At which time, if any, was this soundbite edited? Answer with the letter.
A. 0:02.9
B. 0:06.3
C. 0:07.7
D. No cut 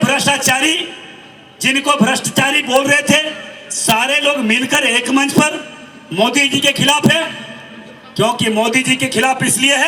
D